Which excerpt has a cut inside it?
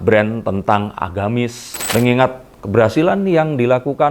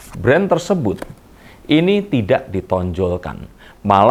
first; 1 cut; at 1.9 s

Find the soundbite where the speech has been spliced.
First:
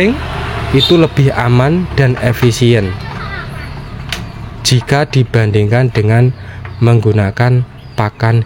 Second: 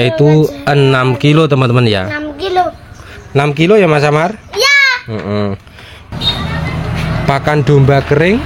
second; 1 cut; at 6.0 s

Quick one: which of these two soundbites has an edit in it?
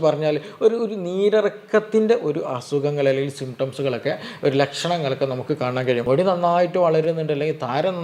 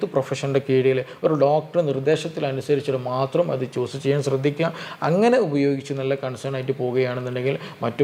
first; 1 cut; at 6.0 s

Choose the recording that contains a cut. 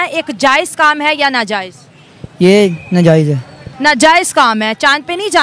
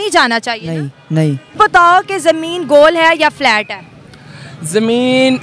second; 1 cut; at 1.6 s

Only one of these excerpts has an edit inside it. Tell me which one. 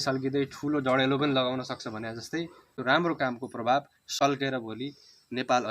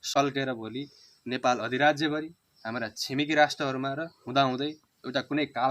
first; 1 cut; at 2.7 s

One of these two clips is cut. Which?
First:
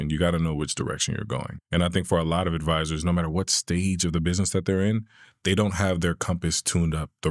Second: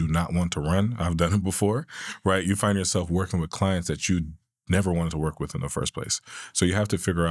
first; 1 cut; at 1.5 s

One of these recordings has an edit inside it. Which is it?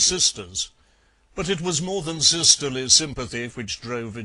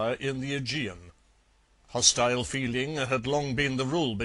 first; 1 cut; at 1.9 s

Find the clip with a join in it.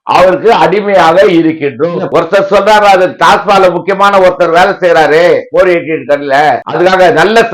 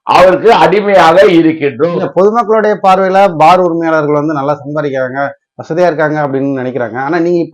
first; 1 cut; at 2.1 s

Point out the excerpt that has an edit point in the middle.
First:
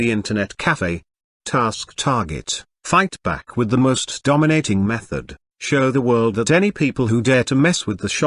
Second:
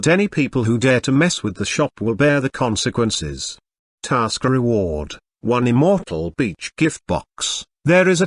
first; 1 cut; at 1.2 s

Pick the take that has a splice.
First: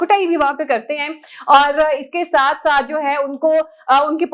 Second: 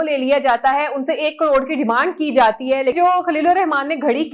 second; 1 cut; at 2.9 s

